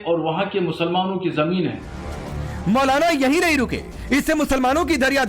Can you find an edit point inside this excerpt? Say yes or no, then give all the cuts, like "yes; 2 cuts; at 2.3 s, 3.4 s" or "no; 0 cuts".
yes; 1 cut; at 2.5 s